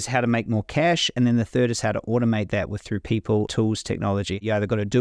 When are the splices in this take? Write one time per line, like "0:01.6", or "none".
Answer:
none